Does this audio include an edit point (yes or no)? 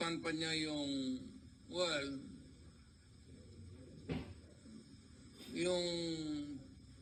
no